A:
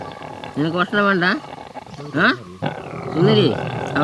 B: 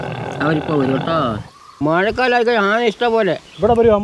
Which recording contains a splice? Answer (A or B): B